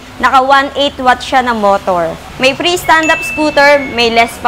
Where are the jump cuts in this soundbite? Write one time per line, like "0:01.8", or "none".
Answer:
0:02.2